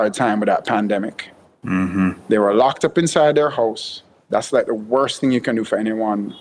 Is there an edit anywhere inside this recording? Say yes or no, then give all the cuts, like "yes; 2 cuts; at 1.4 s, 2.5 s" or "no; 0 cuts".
no; 0 cuts